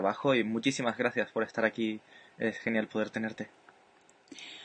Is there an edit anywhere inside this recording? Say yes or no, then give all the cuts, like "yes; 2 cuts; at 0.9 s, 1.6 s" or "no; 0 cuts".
yes; 1 cut; at 1.6 s